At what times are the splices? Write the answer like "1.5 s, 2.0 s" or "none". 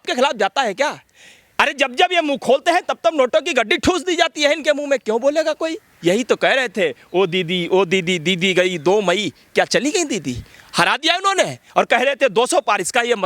5.8 s